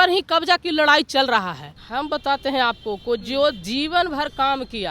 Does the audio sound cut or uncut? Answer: cut